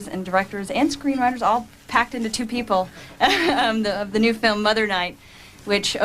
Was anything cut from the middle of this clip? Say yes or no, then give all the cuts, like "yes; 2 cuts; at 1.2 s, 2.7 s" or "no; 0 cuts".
yes; 1 cut; at 2.5 s